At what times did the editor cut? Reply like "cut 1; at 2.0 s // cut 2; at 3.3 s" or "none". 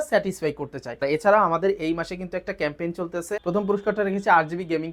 cut 1; at 1.0 s // cut 2; at 3.4 s